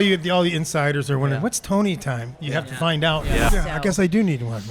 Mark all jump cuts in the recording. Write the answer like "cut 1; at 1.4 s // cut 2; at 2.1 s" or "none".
cut 1; at 3.5 s